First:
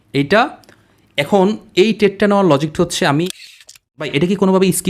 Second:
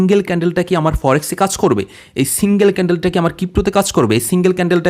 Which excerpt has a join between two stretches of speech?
first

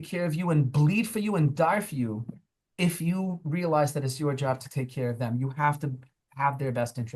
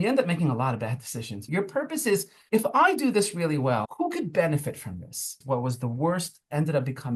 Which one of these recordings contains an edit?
second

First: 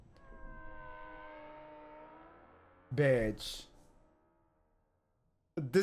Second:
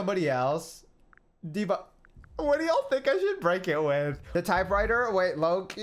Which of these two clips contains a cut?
second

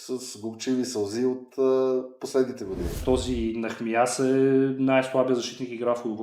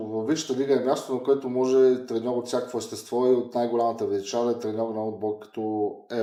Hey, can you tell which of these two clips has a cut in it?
first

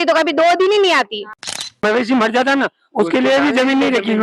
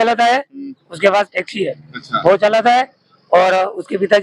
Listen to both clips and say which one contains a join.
first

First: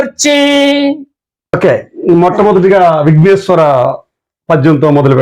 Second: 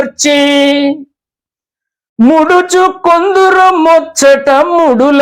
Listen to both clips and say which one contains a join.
first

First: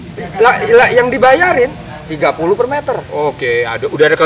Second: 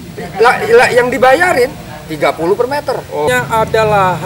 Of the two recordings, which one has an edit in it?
second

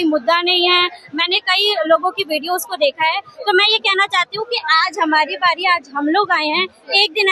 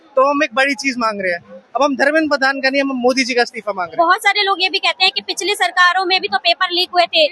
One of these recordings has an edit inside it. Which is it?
second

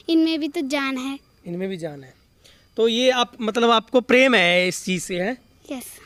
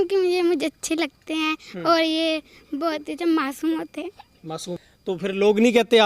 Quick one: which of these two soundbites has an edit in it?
second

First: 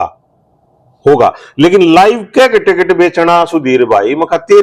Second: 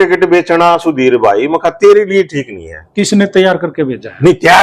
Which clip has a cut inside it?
second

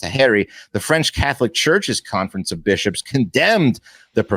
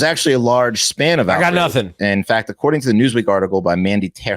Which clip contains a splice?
second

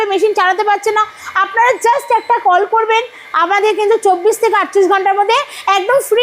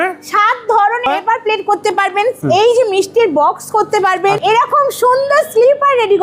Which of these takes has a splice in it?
second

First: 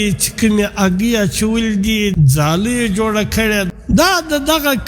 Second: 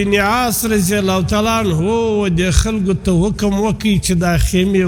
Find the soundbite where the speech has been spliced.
first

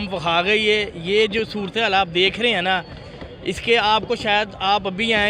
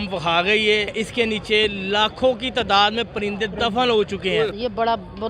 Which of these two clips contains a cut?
second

